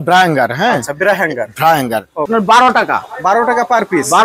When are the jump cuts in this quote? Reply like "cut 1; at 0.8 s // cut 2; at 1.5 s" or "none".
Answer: cut 1; at 2.3 s